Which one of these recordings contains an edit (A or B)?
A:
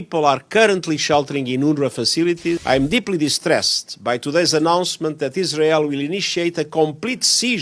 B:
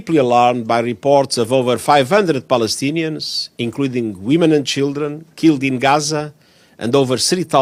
A